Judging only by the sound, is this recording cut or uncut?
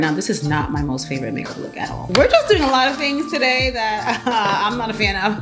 cut